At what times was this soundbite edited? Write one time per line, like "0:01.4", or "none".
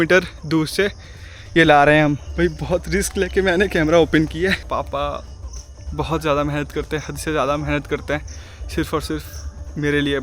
0:02.2
0:04.6